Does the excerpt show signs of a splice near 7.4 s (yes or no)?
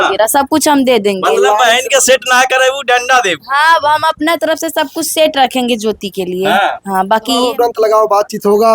yes